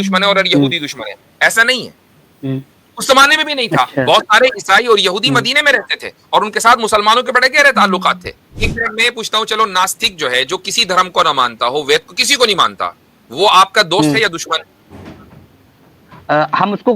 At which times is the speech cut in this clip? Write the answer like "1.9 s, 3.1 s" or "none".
8.6 s